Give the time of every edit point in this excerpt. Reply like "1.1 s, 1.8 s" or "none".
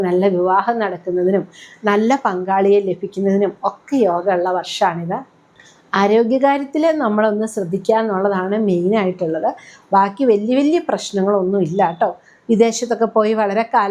none